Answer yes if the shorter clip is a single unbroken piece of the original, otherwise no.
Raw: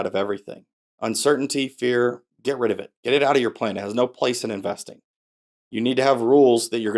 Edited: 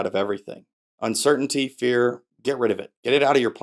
yes